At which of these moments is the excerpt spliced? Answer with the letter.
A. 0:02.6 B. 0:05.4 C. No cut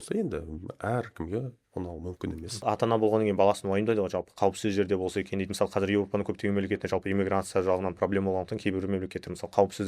A